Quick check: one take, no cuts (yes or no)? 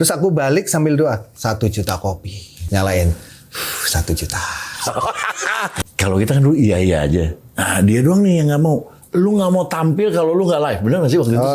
no